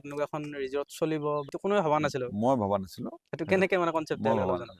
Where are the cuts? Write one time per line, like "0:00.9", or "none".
0:01.5